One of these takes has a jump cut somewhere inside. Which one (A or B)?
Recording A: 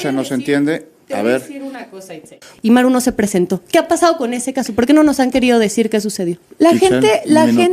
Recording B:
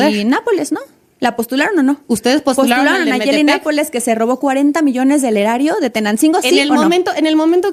A